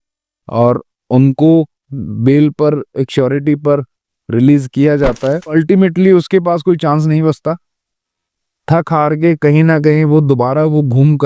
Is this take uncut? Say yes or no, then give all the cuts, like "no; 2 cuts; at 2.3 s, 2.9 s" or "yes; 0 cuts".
no; 1 cut; at 5.5 s